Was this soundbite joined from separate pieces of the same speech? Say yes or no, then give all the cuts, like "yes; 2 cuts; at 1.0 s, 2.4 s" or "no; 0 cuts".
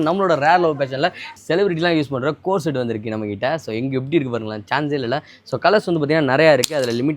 yes; 1 cut; at 1.3 s